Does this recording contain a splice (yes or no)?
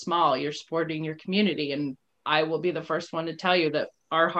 yes